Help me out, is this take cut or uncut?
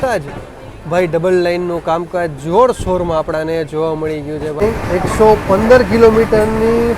cut